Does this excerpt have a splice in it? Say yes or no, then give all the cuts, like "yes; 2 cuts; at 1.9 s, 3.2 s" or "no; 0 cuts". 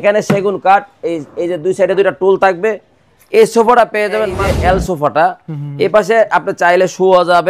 yes; 1 cut; at 4.4 s